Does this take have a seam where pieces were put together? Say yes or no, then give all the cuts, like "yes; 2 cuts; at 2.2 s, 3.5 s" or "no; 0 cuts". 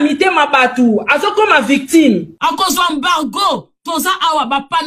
no; 0 cuts